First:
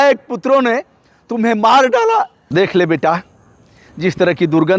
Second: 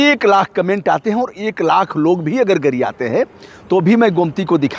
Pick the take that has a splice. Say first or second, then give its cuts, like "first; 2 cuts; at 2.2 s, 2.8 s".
first; 1 cut; at 2.4 s